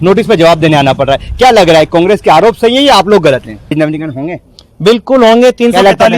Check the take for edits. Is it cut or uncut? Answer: cut